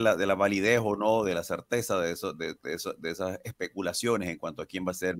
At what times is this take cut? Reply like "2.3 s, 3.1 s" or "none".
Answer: none